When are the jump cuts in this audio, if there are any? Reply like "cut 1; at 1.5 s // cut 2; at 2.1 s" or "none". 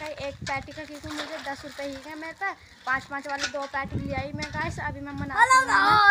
none